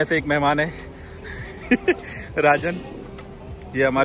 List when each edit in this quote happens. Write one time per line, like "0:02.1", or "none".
none